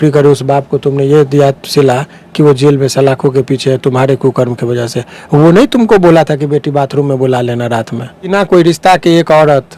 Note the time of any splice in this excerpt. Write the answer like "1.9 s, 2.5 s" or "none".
8.3 s